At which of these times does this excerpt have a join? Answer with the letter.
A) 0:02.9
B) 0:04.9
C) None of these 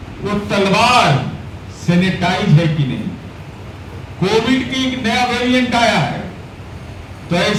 C